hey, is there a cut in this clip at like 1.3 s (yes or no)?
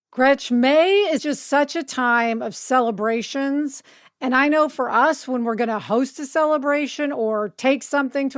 yes